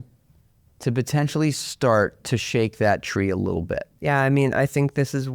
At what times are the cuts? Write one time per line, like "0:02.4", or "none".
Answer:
0:03.9